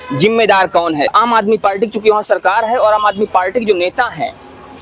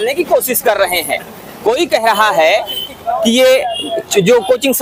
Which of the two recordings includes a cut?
first; 1 cut; at 1.2 s

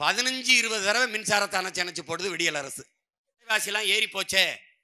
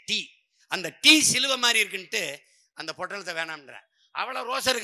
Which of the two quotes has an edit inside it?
first; 1 cut; at 3.5 s

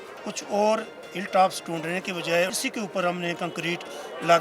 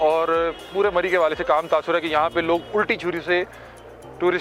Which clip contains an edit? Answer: first; 1 cut; at 2.5 s

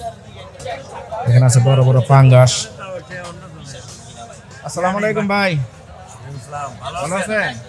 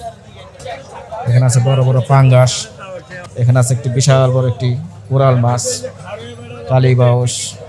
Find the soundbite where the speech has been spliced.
second; 1 cut; at 3.2 s

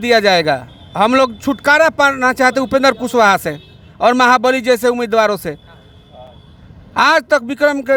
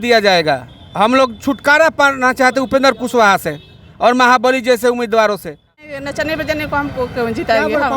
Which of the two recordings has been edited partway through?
second; 1 cut; at 6.0 s

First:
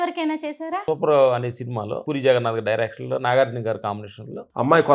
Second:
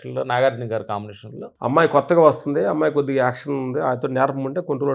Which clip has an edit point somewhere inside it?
first; 2 cuts; at 0.8 s, 2.0 s

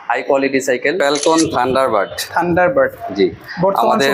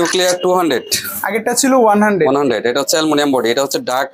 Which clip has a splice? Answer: first; 1 cut; at 1.0 s

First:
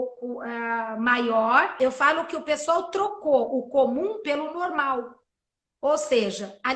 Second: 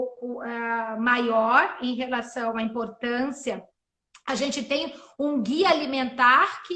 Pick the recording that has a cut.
first; 1 cut; at 1.8 s

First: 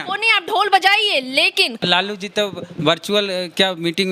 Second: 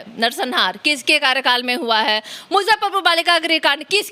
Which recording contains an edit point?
first; 1 cut; at 1.8 s

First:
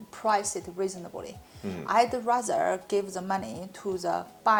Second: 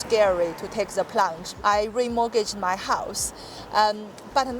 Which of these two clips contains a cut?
second; 1 cut; at 1.5 s

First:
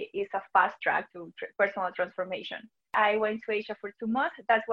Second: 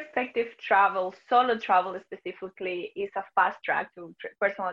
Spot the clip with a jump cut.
first; 1 cut; at 2.9 s

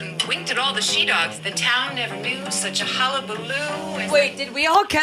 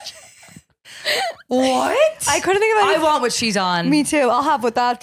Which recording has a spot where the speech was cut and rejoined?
first; 1 cut; at 3.9 s

